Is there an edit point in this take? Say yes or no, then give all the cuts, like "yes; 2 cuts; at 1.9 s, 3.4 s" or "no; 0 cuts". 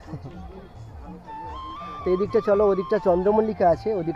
no; 0 cuts